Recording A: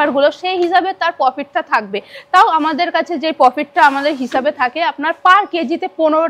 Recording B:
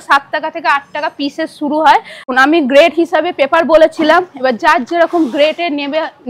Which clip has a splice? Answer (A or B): B